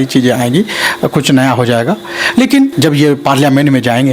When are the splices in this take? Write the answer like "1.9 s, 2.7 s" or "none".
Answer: 2.7 s